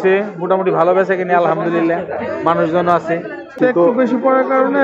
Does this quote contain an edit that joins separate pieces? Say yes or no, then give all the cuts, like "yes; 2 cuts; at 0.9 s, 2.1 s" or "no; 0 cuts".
yes; 1 cut; at 3.6 s